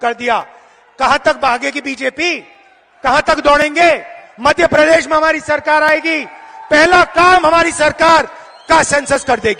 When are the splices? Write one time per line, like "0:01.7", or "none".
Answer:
none

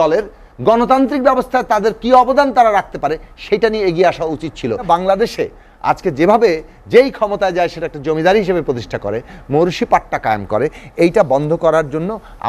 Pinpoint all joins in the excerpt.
0:04.8

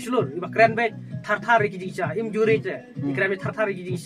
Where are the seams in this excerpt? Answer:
none

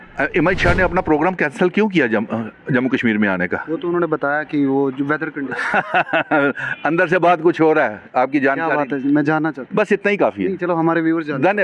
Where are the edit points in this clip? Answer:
none

